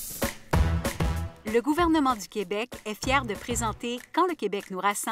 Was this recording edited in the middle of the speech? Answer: yes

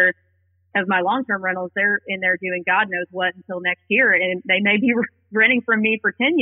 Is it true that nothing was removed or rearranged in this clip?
yes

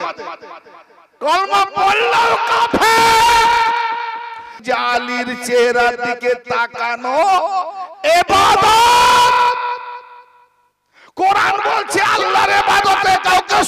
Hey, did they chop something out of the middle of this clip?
yes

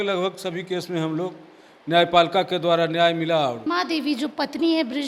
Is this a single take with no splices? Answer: no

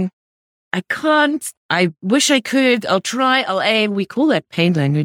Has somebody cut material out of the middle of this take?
yes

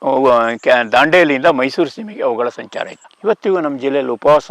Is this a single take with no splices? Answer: no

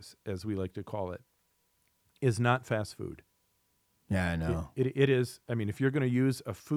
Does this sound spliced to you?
no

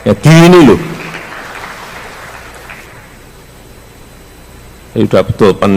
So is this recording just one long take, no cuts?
no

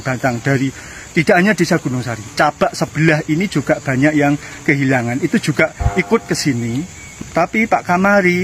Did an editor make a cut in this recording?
yes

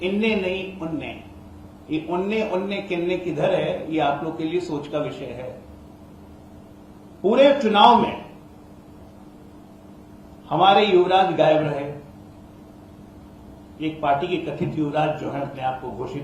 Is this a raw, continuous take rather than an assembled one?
yes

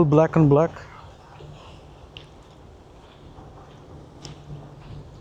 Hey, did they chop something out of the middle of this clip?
no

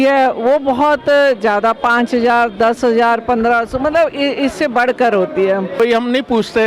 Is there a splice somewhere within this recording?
yes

